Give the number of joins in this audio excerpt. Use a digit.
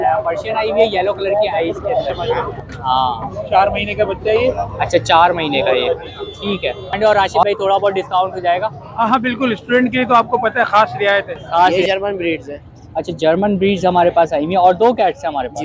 3